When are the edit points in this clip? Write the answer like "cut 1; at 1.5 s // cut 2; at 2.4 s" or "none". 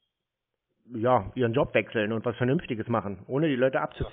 none